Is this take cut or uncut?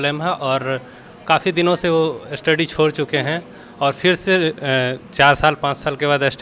uncut